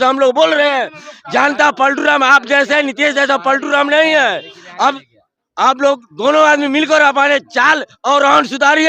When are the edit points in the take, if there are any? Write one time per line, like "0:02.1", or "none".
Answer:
0:05.1